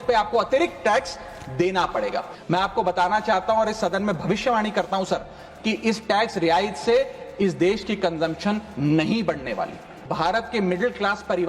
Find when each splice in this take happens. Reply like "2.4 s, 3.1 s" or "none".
2.3 s, 10.1 s